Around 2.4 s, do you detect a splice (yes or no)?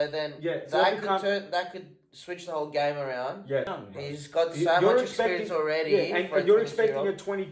no